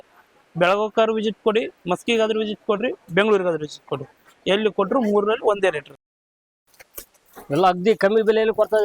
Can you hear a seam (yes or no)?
yes